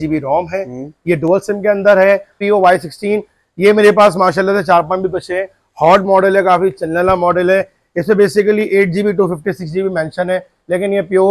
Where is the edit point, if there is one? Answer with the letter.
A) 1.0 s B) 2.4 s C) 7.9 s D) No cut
B